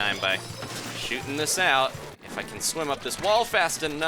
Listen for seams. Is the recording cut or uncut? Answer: cut